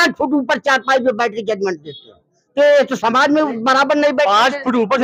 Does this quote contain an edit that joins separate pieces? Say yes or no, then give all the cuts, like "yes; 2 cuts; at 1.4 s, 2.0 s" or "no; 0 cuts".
no; 0 cuts